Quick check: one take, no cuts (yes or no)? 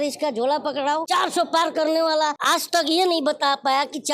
no